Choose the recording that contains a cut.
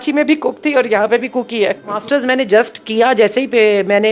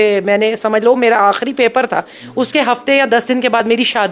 first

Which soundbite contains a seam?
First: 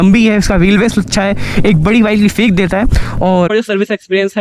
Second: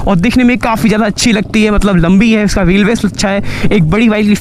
first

